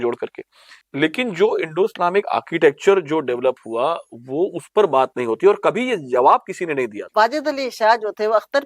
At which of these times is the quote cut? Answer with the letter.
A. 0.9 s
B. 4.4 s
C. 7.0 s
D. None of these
C